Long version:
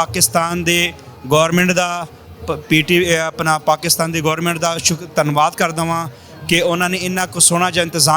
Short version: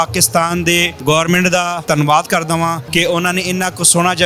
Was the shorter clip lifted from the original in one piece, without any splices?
no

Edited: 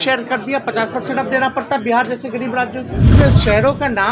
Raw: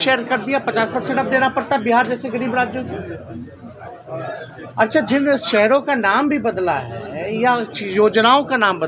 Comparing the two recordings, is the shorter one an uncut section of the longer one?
no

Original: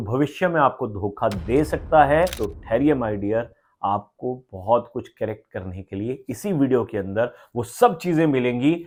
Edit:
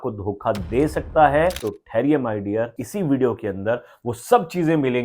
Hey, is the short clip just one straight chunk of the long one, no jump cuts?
no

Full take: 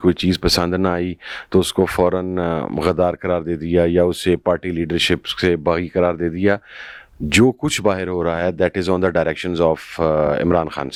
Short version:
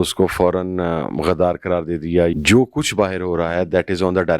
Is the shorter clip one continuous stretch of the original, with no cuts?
no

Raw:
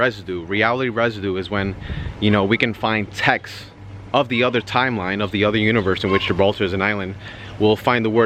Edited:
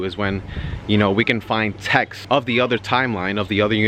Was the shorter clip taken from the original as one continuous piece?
no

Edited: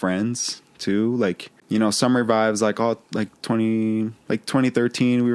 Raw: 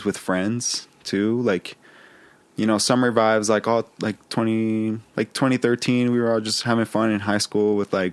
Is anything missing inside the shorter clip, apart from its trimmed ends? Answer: yes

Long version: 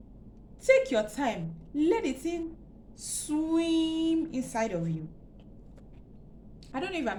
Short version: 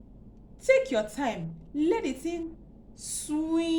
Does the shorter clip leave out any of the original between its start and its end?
no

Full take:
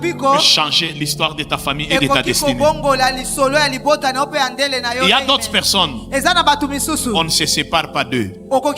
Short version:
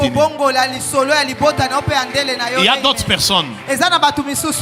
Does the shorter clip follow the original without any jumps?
yes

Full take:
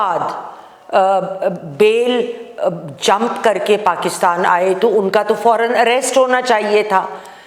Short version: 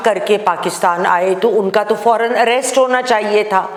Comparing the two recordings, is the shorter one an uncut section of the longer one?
yes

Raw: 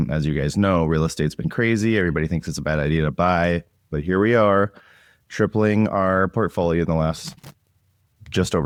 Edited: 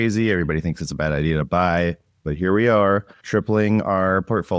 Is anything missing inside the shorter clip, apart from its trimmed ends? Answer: yes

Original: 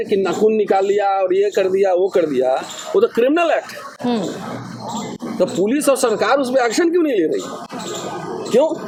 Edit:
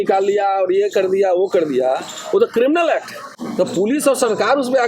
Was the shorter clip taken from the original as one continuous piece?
no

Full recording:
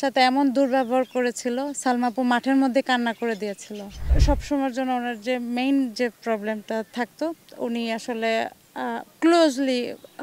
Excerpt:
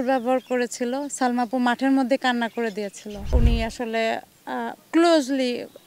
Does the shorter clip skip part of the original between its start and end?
yes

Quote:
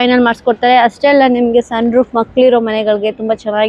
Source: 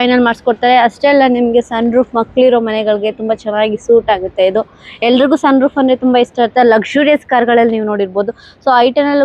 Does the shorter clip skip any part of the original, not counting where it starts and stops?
no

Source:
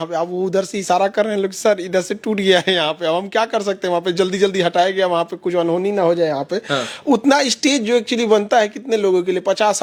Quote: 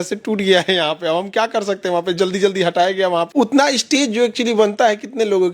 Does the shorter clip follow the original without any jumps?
no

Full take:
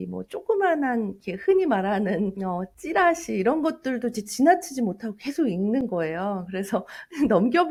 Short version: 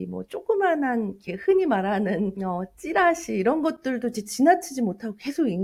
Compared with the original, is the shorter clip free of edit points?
yes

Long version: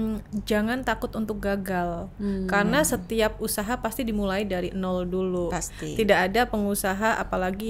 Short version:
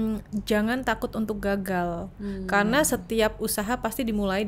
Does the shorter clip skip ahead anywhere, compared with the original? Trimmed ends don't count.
no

